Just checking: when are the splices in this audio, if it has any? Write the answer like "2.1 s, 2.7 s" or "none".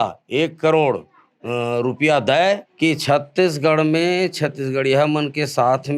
2.7 s